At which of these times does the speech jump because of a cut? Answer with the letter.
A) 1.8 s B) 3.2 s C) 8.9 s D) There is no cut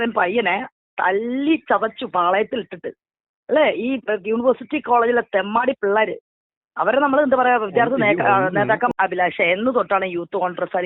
C